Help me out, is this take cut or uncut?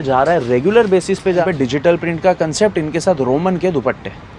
cut